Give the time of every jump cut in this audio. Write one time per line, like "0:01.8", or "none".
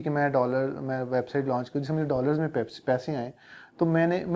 none